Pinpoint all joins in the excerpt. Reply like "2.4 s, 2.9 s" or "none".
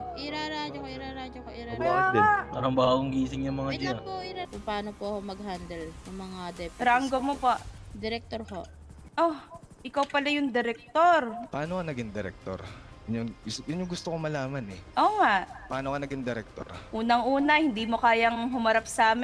4.5 s, 11.4 s